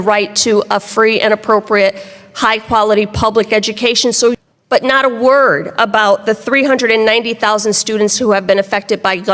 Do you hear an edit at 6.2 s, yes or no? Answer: no